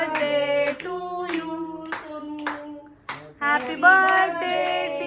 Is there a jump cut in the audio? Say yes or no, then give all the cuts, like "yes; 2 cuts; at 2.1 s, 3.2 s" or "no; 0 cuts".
no; 0 cuts